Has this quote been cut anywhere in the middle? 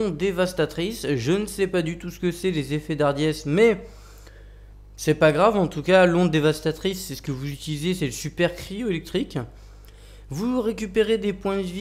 yes; 1 cut; at 10.1 s

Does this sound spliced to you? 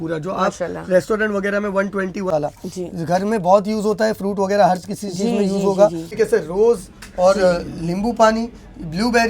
yes; 2 cuts; at 2.3 s, 6.1 s

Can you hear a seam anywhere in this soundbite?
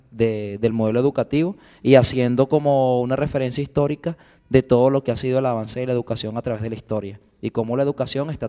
yes; 1 cut; at 6.8 s

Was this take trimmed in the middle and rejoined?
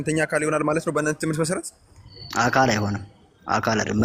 no; 0 cuts

